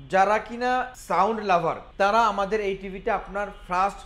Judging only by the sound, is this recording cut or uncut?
cut